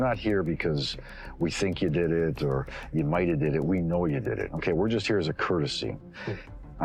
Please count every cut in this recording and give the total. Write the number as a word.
zero